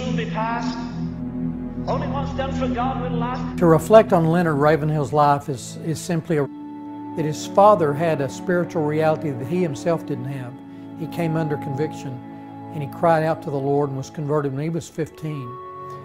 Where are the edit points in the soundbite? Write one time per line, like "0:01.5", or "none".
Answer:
none